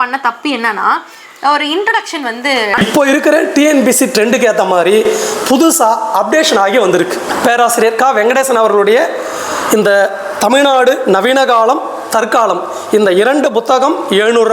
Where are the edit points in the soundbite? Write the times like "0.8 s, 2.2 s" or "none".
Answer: 2.8 s, 7.2 s